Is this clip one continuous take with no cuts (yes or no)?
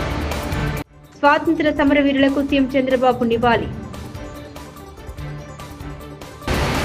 yes